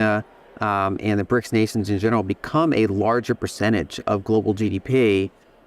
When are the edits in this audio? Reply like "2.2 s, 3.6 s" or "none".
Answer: none